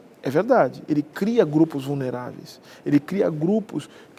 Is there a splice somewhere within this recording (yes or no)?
no